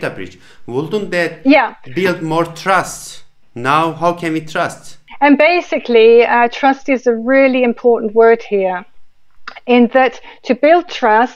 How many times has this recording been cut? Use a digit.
1